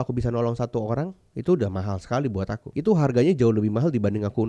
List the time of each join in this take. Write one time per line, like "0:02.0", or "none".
0:01.2
0:02.6